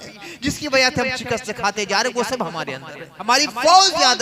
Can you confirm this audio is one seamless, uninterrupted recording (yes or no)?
no